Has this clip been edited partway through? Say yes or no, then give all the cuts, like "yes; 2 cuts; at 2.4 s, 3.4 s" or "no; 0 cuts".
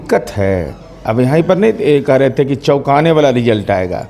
no; 0 cuts